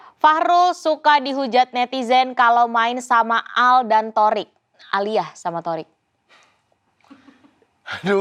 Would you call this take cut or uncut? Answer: uncut